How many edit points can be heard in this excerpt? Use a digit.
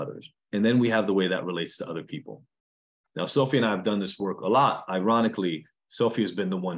0